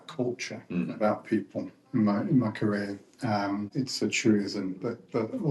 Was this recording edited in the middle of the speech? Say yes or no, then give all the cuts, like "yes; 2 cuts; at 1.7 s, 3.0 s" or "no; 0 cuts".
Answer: yes; 1 cut; at 3.7 s